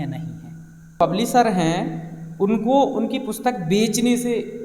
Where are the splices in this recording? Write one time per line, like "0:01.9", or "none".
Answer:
0:01.0